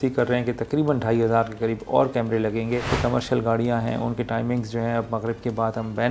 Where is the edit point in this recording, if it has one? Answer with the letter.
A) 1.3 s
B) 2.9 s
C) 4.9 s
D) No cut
B